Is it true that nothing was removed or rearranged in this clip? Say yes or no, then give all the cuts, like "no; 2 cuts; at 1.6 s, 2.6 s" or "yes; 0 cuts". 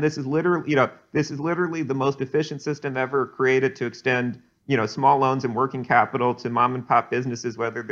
yes; 0 cuts